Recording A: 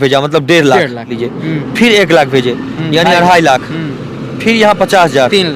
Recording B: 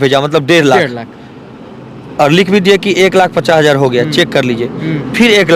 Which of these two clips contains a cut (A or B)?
A